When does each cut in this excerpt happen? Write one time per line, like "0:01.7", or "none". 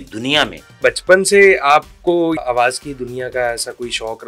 0:00.8
0:02.4

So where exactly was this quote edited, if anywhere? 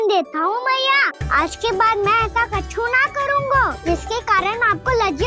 0:01.2
0:03.8

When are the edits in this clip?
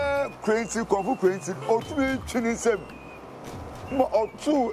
none

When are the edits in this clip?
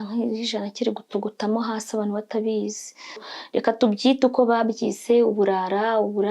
0:03.3

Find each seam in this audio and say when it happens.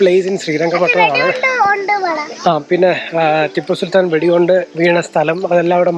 none

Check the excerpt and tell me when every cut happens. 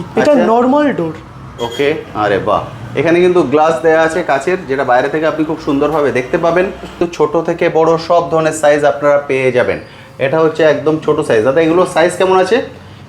0:07.0

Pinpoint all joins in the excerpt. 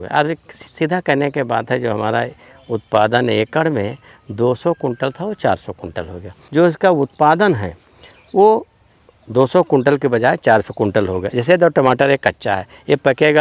0:06.4

